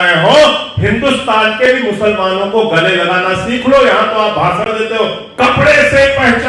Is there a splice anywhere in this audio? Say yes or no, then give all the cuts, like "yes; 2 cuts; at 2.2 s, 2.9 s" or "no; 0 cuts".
no; 0 cuts